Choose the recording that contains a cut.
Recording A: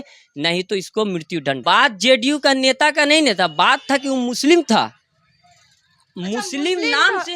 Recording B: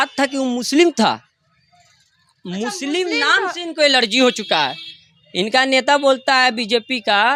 A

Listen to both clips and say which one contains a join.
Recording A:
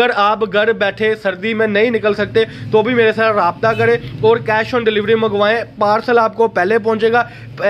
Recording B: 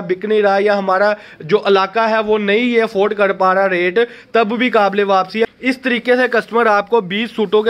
B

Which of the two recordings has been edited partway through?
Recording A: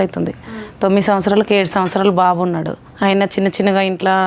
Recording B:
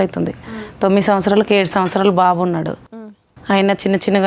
A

